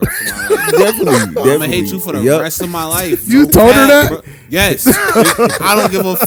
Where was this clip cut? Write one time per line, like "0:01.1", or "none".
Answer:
none